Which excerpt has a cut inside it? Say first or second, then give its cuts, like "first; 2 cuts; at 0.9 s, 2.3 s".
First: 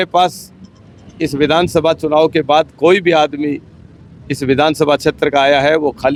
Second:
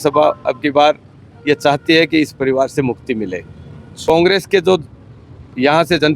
second; 1 cut; at 4.0 s